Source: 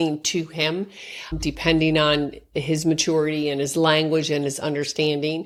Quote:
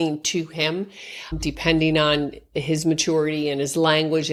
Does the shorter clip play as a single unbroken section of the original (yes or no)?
yes